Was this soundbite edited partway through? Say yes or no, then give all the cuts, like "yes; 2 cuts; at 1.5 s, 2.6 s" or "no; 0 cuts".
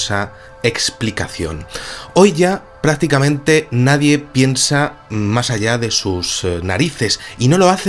yes; 1 cut; at 1.7 s